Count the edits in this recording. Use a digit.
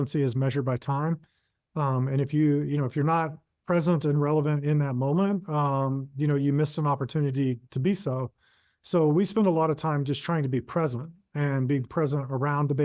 0